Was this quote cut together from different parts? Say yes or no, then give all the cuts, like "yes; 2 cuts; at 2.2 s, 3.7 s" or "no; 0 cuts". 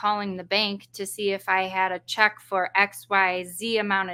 no; 0 cuts